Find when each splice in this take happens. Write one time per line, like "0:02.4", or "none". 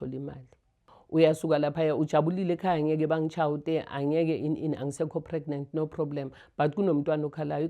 0:00.9